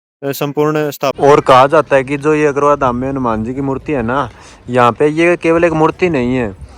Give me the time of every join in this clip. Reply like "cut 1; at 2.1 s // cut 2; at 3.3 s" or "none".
cut 1; at 1.2 s